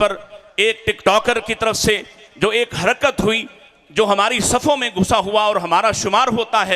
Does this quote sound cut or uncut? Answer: uncut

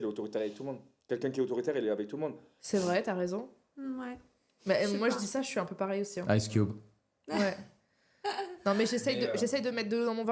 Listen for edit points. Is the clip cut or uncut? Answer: uncut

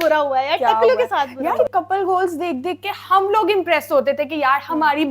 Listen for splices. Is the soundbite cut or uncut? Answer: cut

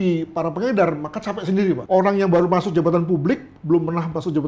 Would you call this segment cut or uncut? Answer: cut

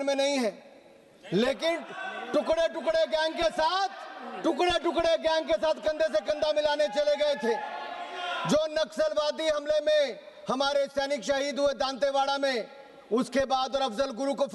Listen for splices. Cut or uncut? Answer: uncut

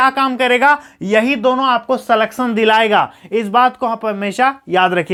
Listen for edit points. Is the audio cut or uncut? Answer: uncut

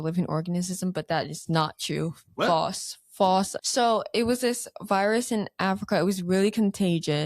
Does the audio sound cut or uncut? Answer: cut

